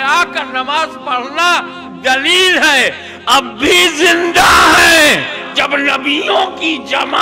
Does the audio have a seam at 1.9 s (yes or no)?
no